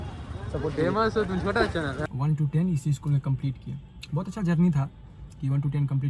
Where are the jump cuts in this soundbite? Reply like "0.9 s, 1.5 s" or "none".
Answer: 2.0 s